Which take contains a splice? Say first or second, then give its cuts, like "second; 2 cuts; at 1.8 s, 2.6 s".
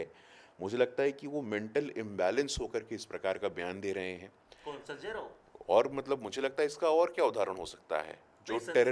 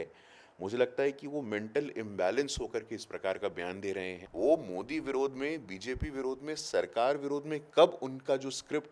second; 1 cut; at 4.2 s